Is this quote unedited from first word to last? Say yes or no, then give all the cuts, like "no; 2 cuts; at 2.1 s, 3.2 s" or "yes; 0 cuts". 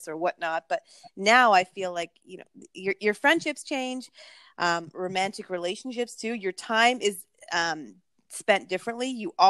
yes; 0 cuts